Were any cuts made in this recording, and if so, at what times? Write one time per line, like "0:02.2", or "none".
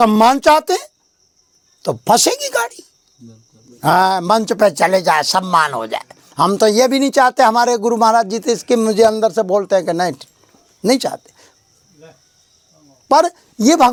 none